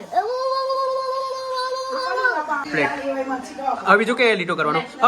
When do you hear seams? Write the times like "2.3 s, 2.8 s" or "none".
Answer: 2.7 s